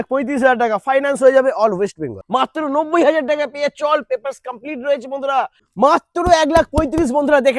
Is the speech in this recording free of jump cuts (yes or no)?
no